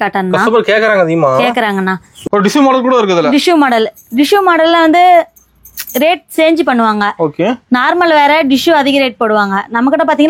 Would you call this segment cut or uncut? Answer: cut